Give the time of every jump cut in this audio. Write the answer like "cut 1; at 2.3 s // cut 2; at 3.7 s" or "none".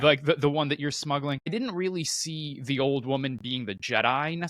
cut 1; at 1.5 s